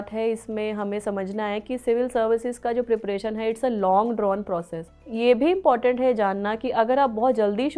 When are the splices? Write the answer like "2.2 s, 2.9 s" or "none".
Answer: 5.1 s